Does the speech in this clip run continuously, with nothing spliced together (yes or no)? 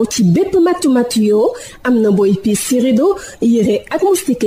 yes